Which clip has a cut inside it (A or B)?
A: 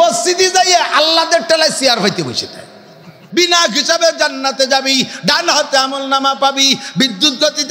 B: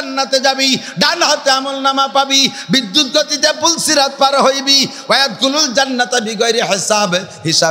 A